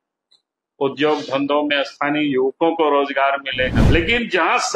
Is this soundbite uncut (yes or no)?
no